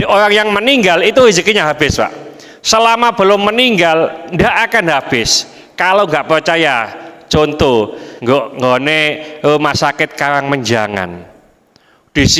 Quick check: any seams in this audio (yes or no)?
yes